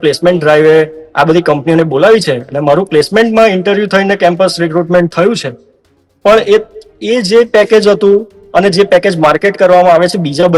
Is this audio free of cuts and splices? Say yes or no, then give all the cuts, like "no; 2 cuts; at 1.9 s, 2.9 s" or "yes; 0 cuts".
yes; 0 cuts